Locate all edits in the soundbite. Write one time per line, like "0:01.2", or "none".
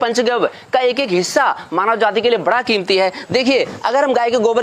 0:03.2